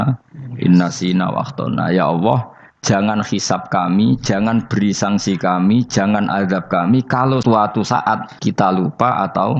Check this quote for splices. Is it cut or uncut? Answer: cut